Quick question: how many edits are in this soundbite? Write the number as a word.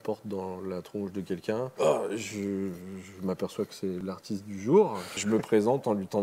two